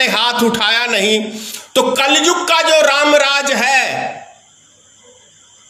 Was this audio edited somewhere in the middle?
no; 0 cuts

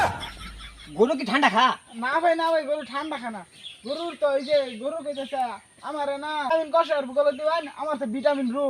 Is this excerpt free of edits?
no; 1 cut; at 6.5 s

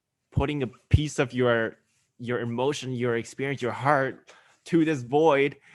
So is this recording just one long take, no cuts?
yes; 0 cuts

